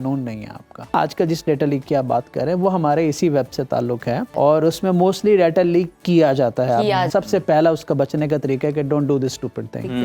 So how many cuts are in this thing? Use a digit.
3